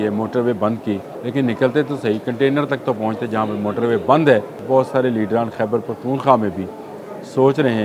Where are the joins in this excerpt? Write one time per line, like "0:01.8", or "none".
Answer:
0:01.1
0:04.5